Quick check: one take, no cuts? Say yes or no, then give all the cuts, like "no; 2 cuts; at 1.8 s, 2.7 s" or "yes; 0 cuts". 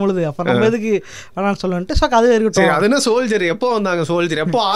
yes; 0 cuts